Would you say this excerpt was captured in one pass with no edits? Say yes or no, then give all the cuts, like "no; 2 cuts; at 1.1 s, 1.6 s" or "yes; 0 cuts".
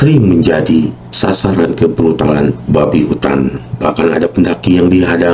no; 2 cuts; at 1.1 s, 3.7 s